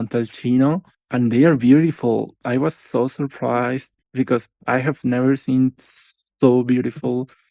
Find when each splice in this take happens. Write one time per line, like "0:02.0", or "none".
0:00.9